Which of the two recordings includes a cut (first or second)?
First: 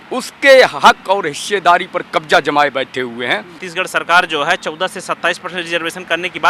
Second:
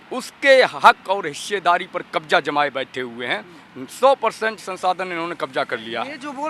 first